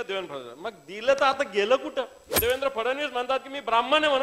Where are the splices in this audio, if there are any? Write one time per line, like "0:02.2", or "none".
0:02.3